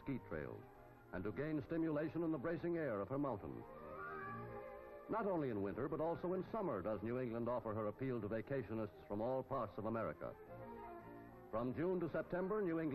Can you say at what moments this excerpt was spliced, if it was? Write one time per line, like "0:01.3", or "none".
none